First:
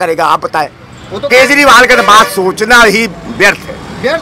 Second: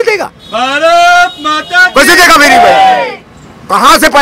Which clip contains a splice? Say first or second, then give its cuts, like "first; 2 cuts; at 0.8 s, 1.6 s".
first; 1 cut; at 1.3 s